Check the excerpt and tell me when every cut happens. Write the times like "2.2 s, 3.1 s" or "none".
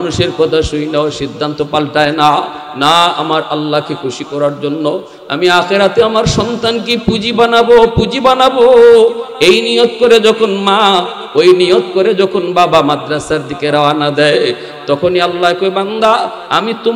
14.7 s